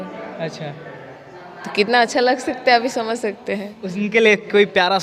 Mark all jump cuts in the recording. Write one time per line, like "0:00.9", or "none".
none